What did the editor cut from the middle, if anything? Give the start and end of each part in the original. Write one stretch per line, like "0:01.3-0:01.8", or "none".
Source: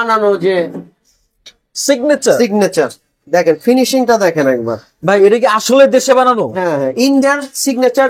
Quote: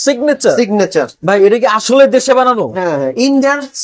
0:03.0-0:05.0